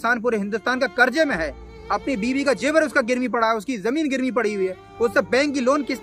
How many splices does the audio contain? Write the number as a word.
zero